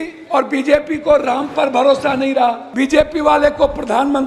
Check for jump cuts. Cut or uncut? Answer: cut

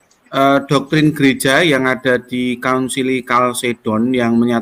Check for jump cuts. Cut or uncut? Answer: uncut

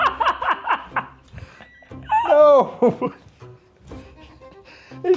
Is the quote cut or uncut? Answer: uncut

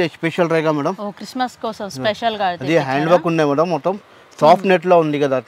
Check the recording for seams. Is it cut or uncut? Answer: uncut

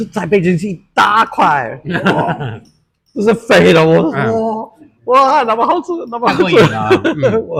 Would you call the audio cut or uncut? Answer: uncut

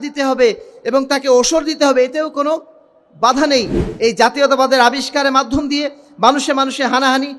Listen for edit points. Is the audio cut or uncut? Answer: cut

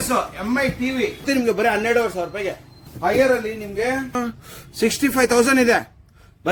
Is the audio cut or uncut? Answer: cut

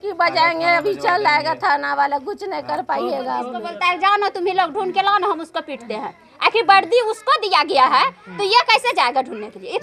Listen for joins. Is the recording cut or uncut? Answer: cut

